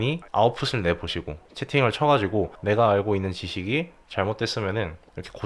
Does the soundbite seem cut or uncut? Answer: uncut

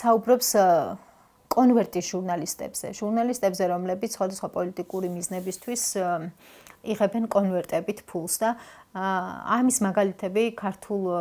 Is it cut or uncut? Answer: uncut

